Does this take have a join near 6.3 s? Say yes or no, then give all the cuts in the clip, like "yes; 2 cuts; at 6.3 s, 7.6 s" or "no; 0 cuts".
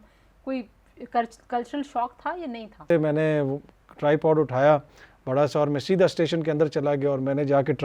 no; 1 cut; at 2.9 s